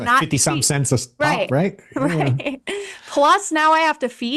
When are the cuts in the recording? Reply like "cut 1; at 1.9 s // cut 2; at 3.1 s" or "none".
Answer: none